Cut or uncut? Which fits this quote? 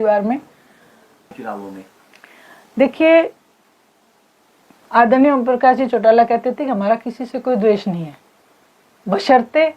cut